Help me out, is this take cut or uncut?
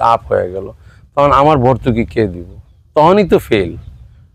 uncut